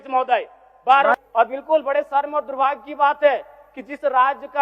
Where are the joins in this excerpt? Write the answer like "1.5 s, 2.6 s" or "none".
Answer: 1.2 s